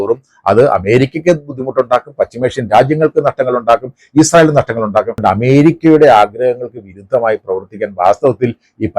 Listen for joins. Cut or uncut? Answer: cut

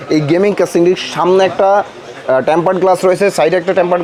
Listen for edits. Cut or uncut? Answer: uncut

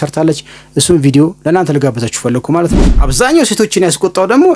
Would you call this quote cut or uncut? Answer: cut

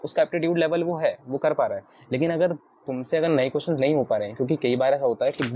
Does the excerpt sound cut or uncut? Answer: uncut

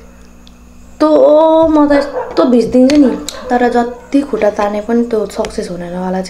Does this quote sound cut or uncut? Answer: cut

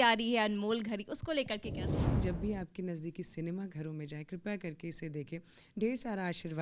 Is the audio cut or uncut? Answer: cut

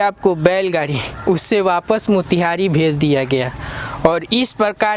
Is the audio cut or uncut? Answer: uncut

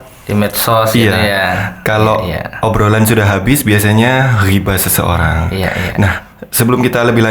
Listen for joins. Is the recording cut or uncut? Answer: uncut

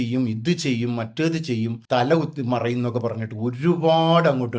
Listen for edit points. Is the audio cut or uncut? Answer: cut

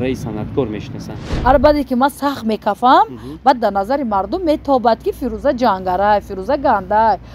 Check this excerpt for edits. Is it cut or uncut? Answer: cut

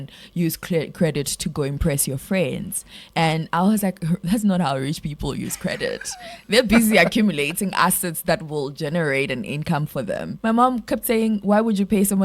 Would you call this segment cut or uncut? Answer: cut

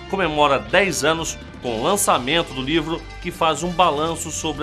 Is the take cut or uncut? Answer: uncut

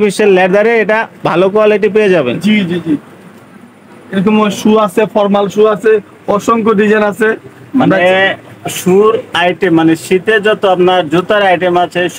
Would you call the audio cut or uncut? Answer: uncut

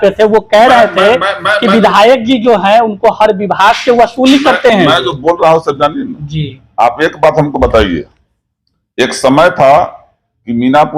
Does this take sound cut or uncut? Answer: uncut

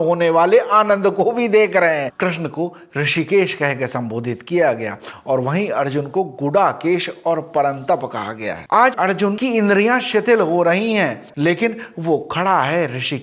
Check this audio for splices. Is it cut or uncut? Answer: cut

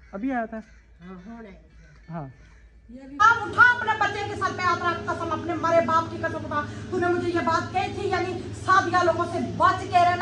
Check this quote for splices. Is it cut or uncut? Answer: cut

